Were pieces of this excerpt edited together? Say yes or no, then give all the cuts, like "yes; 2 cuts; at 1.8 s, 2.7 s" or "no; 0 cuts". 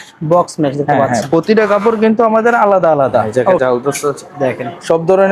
yes; 1 cut; at 3.6 s